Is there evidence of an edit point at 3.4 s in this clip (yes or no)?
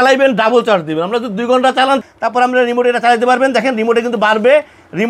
no